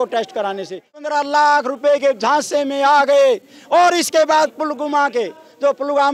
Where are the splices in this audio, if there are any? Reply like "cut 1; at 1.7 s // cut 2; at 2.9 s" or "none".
cut 1; at 0.9 s